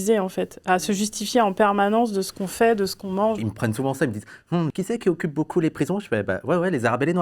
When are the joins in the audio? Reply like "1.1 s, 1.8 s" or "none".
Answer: 3.4 s, 4.7 s

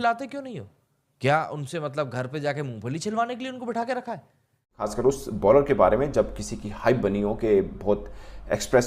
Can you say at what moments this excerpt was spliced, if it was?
4.8 s

